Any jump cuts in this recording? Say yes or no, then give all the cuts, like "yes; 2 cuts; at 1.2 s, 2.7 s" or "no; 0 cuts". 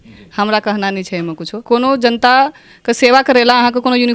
yes; 1 cut; at 1.6 s